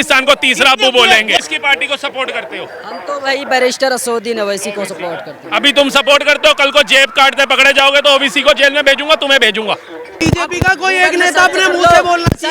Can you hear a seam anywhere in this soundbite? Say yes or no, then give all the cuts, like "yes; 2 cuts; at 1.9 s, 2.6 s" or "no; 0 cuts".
yes; 2 cuts; at 1.5 s, 10.1 s